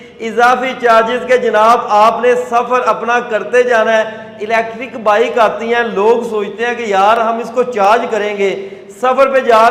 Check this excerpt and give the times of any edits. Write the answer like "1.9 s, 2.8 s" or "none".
none